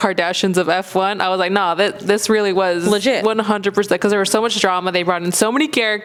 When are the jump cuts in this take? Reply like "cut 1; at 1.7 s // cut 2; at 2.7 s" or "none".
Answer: none